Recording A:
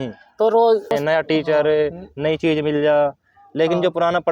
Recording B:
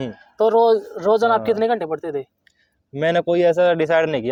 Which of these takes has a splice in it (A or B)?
A